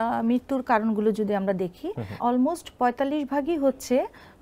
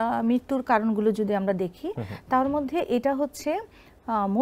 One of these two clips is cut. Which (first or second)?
first